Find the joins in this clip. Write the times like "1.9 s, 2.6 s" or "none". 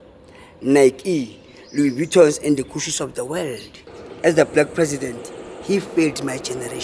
3.7 s